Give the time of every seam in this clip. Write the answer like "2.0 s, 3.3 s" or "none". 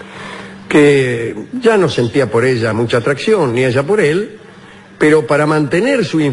3.9 s